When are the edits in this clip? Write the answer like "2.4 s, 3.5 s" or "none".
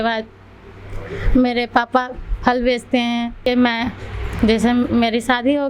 3.5 s